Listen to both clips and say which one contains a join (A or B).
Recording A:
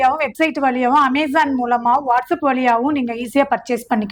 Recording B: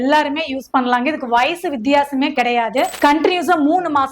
B